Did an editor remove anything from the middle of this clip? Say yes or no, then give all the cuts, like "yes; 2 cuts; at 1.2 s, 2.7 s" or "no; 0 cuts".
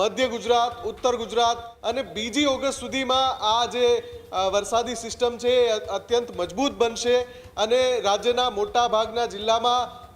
yes; 1 cut; at 1.7 s